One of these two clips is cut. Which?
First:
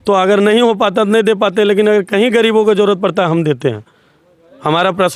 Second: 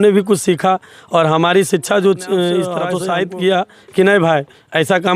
second; 1 cut; at 2.9 s

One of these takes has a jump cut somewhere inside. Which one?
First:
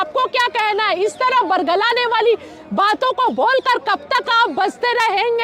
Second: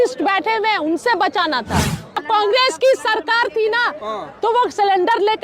second; 1 cut; at 2.2 s

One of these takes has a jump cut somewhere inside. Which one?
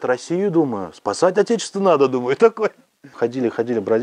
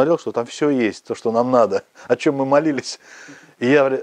first; 1 cut; at 3.1 s

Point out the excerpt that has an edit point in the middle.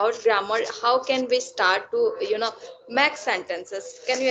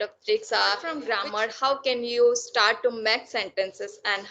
second; 1 cut; at 1.0 s

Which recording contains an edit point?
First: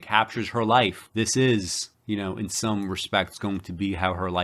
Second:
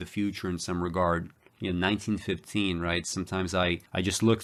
first; 1 cut; at 1.0 s

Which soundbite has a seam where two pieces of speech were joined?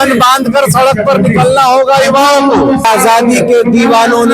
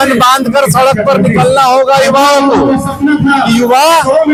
first; 1 cut; at 2.8 s

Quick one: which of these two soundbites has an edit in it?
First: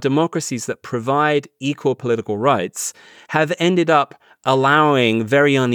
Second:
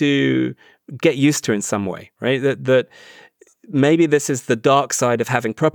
second; 1 cut; at 3.7 s

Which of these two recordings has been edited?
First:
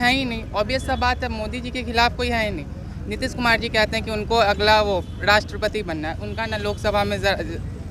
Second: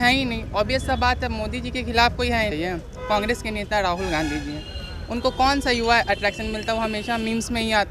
second; 1 cut; at 2.5 s

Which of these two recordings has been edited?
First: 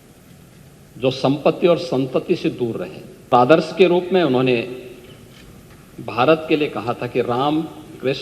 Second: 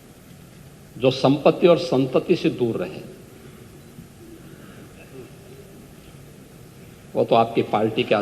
first; 1 cut; at 3.3 s

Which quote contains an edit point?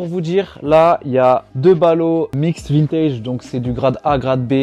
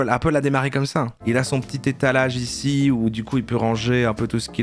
second; 2 cuts; at 1.2 s, 3.1 s

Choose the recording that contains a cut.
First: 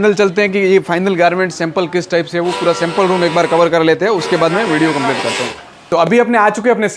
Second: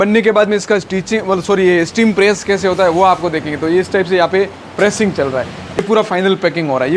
second; 1 cut; at 5.8 s

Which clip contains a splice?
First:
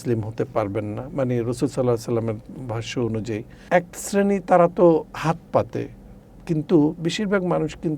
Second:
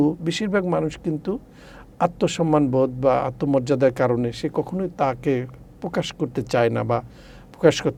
first; 1 cut; at 3.6 s

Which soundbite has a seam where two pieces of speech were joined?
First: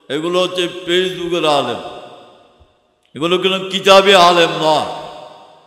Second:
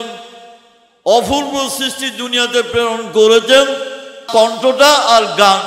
second; 1 cut; at 4.2 s

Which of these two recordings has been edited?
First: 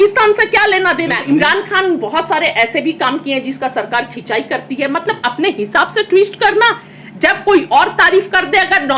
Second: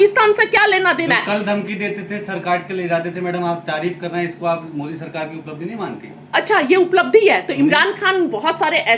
first; 1 cut; at 1.2 s

